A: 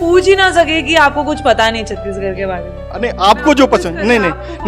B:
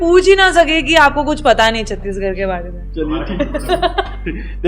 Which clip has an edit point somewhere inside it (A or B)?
A